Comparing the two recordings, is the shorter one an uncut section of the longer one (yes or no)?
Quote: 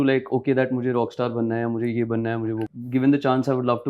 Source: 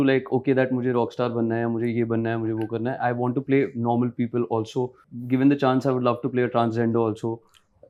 no